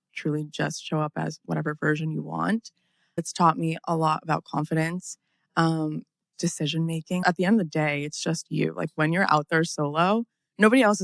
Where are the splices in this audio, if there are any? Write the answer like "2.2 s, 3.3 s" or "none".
3.2 s, 7.2 s

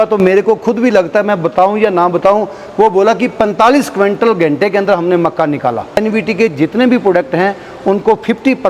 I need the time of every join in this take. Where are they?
6.0 s

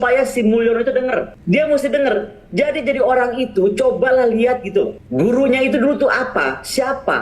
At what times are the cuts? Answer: 1.3 s, 5.0 s

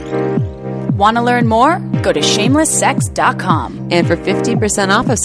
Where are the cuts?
1.0 s

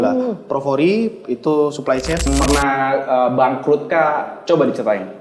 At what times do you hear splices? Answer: 2.3 s

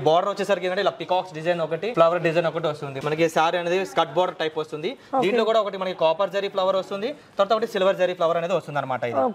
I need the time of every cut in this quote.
2.9 s

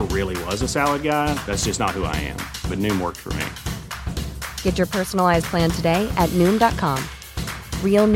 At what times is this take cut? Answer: none

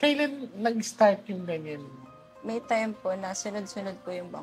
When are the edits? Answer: 2.3 s

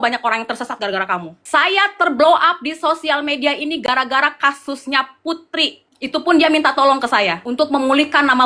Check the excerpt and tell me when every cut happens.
1.4 s

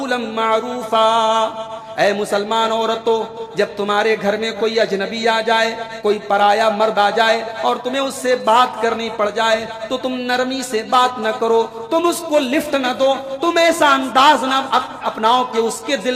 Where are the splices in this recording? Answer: none

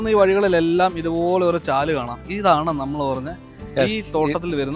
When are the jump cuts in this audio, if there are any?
none

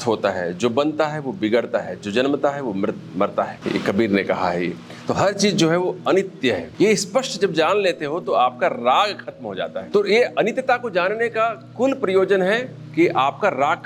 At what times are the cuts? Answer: 3.6 s, 6.7 s, 9.8 s

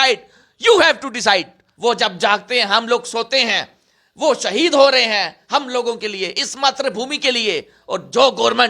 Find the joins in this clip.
1.6 s

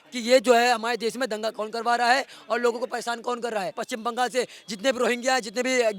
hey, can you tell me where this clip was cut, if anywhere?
3.8 s

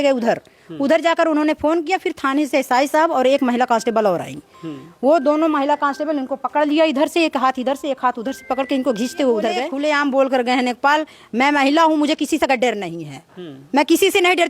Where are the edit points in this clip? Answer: 9.7 s

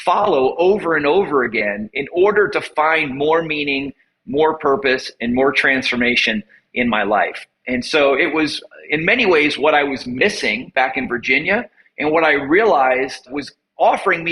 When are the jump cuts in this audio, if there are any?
13.3 s

